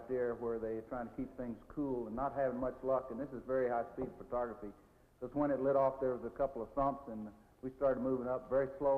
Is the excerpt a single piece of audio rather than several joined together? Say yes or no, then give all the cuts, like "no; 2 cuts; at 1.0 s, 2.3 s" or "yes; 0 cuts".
yes; 0 cuts